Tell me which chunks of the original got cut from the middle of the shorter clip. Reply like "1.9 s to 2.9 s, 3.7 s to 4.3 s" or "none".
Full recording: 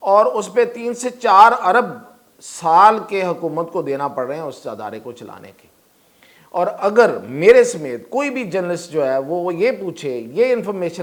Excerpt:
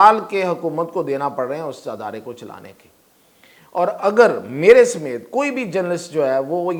none